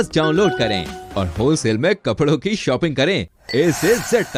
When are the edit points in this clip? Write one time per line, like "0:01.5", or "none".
none